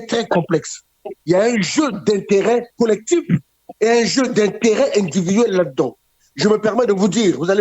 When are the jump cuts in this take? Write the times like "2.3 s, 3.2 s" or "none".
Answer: 2.7 s